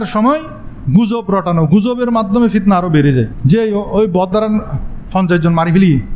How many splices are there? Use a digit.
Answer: 1